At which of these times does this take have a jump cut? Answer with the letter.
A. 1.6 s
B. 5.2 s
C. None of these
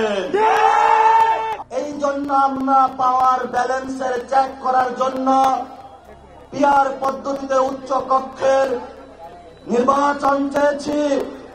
A